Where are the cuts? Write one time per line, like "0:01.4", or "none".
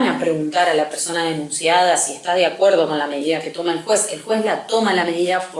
none

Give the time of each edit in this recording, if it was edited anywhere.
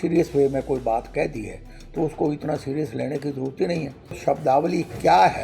0:04.2

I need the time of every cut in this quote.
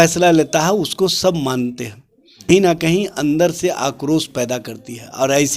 0:02.5

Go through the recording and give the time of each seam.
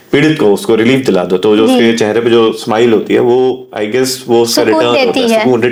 none

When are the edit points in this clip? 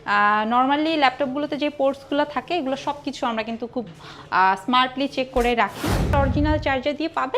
0:06.1

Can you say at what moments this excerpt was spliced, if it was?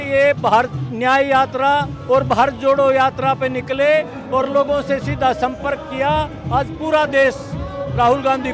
none

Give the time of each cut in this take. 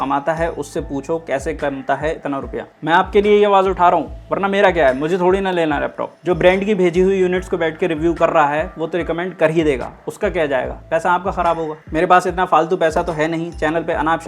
0:02.7
0:06.1
0:11.8

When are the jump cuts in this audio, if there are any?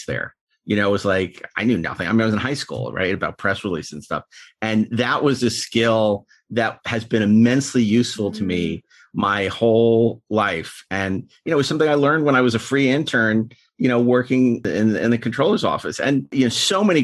0:14.7
0:16.3

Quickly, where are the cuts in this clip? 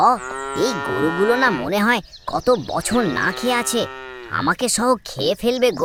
none

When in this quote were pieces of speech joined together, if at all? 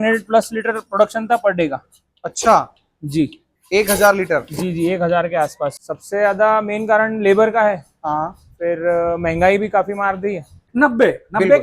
0:05.9
0:10.6

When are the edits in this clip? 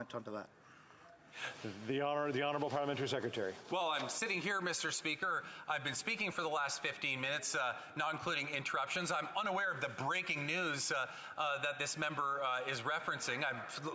0:02.0

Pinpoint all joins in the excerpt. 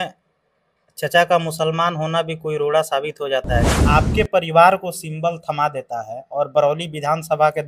0:03.8

